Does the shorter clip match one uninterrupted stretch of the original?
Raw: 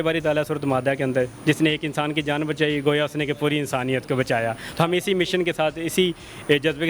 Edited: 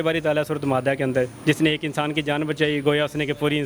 yes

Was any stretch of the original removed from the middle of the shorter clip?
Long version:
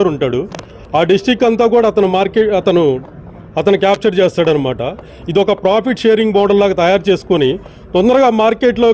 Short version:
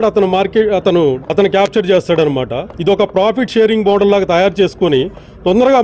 yes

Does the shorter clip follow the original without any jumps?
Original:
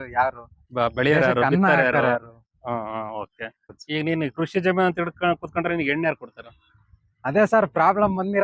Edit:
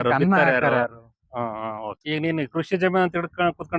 no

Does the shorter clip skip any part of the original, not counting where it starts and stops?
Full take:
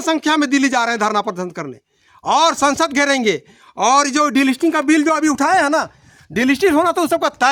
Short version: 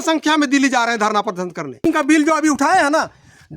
yes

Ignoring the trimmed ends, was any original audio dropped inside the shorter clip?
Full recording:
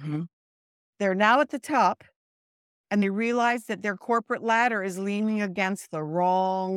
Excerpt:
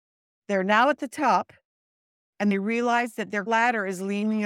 yes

